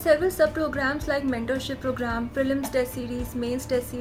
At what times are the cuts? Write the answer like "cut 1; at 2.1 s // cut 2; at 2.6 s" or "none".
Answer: none